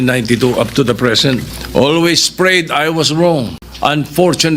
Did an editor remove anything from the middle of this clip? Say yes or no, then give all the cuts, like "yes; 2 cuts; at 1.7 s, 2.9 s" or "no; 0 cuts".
yes; 2 cuts; at 1.6 s, 3.6 s